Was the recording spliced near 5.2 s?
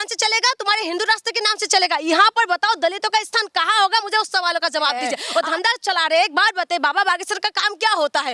yes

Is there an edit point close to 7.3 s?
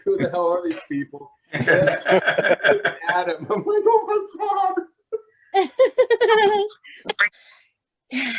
yes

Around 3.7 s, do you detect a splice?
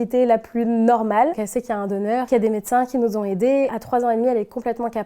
yes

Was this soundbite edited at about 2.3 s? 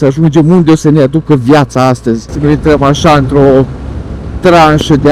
yes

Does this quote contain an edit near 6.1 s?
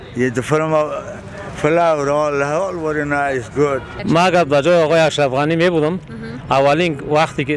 no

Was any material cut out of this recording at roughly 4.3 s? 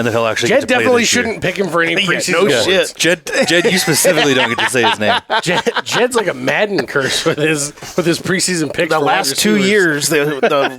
no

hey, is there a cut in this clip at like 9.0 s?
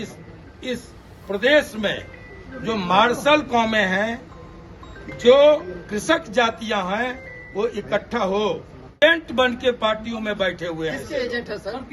yes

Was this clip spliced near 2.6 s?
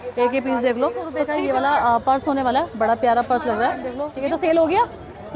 no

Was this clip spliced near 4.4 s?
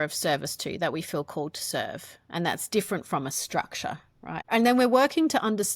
yes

